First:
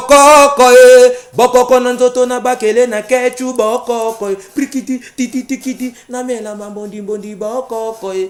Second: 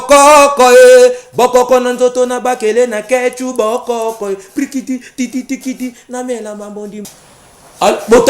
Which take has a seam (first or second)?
second